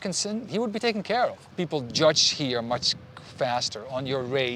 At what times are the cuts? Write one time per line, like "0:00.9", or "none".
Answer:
0:01.4